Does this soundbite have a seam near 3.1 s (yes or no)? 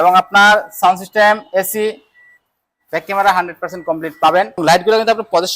no